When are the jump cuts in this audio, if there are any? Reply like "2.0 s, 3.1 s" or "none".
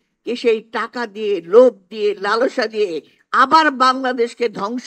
none